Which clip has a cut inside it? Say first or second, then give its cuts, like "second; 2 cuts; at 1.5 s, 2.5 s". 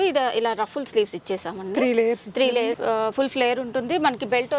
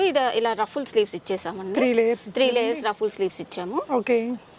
first; 1 cut; at 2.8 s